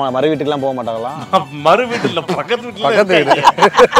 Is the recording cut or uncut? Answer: uncut